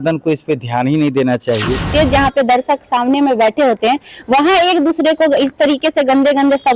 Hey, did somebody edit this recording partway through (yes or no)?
yes